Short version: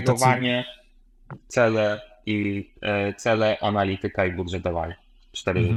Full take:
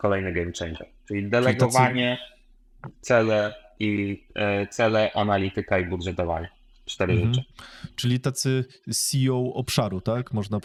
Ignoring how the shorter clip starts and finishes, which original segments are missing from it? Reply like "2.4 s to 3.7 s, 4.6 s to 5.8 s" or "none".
none